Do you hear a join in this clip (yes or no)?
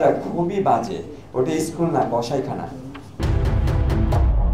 yes